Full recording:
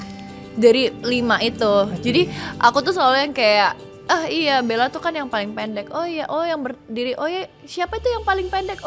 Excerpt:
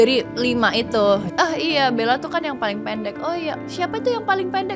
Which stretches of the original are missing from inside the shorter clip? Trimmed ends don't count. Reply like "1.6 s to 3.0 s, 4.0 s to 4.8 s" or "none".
1.9 s to 4.0 s, 6.3 s to 7.5 s